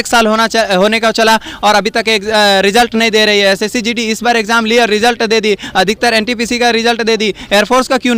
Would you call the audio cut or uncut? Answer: uncut